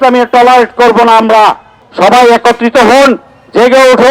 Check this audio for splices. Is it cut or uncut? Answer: cut